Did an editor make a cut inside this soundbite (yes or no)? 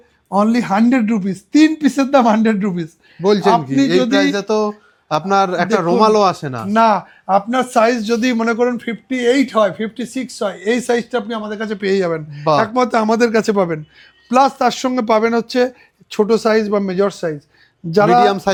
no